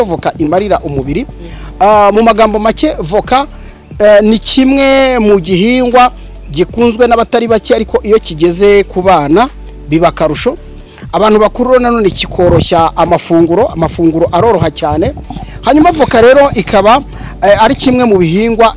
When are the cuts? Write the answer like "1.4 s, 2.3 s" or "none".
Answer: none